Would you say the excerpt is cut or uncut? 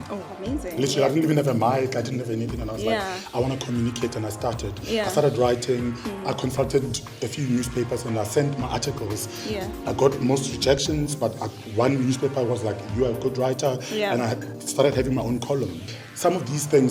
cut